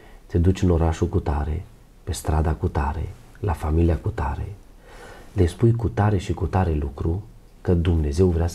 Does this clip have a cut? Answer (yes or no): no